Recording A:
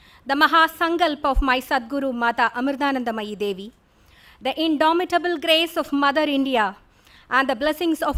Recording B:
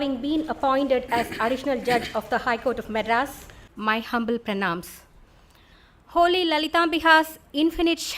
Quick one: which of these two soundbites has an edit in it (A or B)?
B